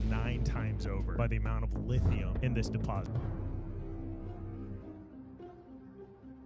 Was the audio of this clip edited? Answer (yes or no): yes